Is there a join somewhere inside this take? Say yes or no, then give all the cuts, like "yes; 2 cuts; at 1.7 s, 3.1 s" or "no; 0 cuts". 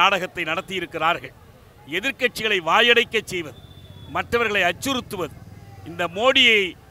no; 0 cuts